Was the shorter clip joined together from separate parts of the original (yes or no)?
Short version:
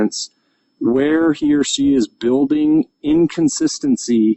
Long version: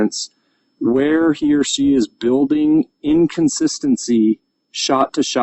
no